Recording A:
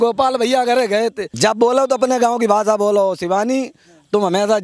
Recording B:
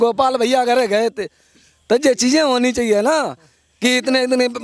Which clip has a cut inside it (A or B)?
A